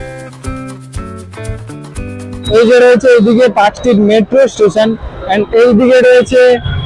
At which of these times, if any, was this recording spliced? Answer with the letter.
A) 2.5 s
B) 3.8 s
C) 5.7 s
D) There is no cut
A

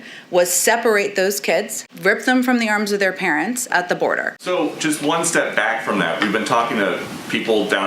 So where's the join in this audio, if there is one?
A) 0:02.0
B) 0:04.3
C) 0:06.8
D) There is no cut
B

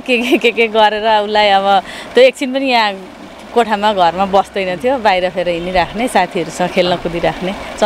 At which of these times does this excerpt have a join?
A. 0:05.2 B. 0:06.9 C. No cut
C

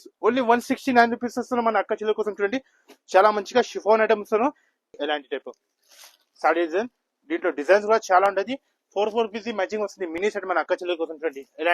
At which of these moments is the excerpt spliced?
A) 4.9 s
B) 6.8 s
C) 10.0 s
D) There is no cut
A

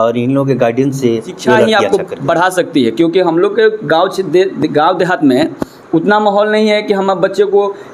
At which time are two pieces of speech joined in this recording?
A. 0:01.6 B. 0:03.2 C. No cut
A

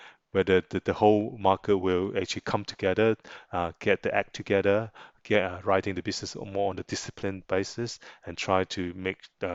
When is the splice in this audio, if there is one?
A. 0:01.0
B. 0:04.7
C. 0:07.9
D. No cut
D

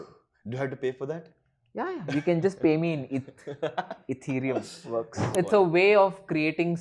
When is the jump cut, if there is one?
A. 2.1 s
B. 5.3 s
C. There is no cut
B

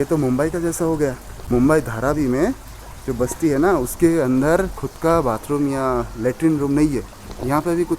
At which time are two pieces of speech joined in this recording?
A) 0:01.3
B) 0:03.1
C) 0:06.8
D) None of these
A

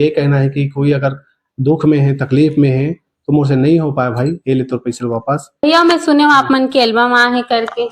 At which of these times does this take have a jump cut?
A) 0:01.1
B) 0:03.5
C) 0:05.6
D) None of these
C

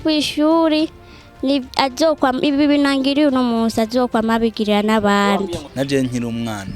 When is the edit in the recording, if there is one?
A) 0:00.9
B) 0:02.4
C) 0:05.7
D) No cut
C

